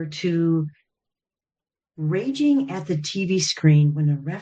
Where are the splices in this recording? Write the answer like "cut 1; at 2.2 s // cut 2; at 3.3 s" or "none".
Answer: none